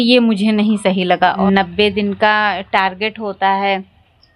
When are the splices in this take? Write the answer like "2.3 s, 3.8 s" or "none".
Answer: 1.4 s